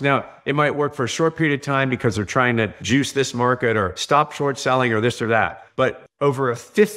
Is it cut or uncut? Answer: cut